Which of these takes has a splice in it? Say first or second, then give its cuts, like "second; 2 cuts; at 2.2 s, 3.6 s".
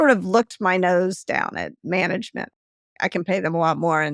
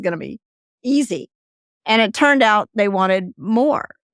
first; 2 cuts; at 1.8 s, 2.9 s